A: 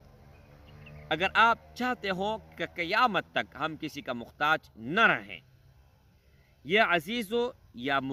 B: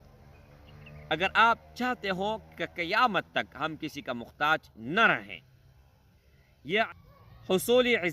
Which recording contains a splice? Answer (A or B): B